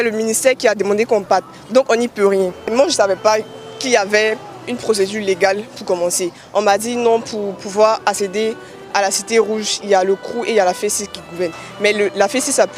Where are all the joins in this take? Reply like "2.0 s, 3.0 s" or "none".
none